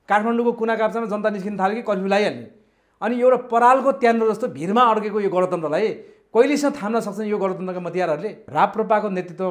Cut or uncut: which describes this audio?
cut